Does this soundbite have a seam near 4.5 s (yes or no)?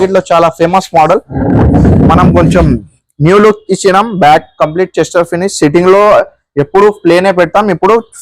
no